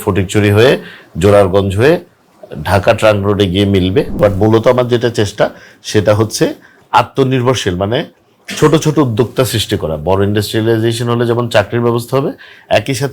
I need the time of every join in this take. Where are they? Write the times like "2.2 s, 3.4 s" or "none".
4.1 s